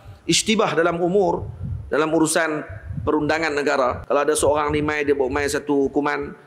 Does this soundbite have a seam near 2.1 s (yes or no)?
no